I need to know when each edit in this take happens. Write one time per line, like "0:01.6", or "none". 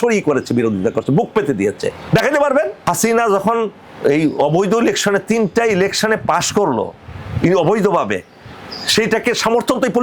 0:02.8